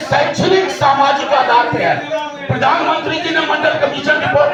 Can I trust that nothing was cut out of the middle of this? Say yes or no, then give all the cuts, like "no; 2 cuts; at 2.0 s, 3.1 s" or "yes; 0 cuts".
yes; 0 cuts